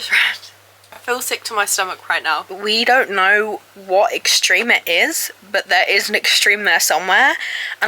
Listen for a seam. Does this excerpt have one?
yes; 2 cuts; at 1.0 s, 2.5 s

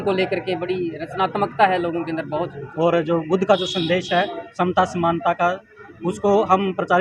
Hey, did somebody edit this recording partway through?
yes; 1 cut; at 2.6 s

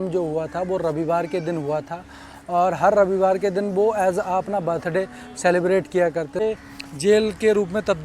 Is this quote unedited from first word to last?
no; 1 cut; at 6.4 s

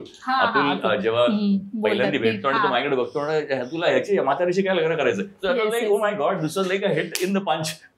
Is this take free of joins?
yes; 0 cuts

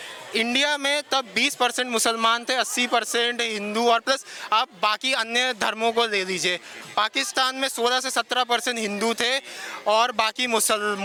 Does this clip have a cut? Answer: no; 0 cuts

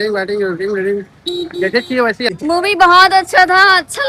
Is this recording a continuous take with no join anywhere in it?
no; 1 cut; at 2.4 s

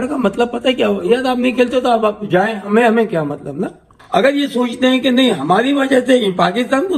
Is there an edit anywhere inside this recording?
yes; 1 cut; at 3.9 s

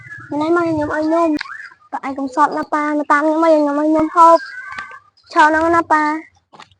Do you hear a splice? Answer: yes; 1 cut; at 1.5 s

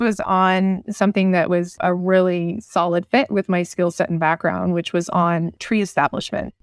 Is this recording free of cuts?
no; 1 cut; at 5.6 s

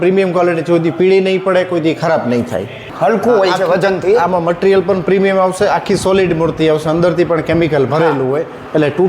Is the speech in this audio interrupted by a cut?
yes; 1 cut; at 3.0 s

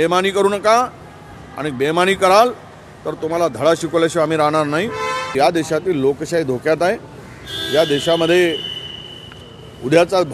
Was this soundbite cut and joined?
yes; 1 cut; at 5.3 s

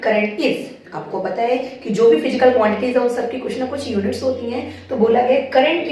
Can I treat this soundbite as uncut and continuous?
yes; 0 cuts

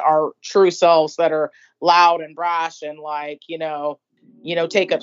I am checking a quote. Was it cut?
yes; 1 cut; at 4.1 s

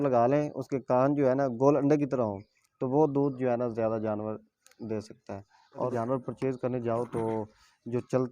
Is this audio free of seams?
no; 1 cut; at 5.9 s

